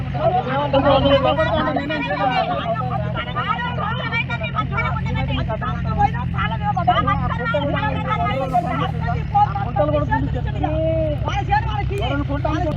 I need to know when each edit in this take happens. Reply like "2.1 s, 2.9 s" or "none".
3.9 s